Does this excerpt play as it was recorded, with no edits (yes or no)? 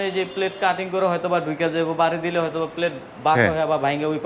yes